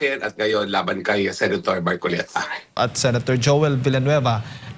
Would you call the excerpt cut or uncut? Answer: cut